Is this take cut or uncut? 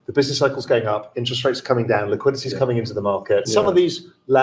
cut